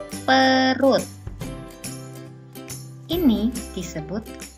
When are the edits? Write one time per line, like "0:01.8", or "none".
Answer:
none